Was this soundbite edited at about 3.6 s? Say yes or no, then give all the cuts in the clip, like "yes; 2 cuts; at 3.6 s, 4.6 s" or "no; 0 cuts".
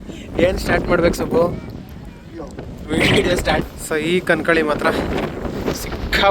yes; 1 cut; at 3.6 s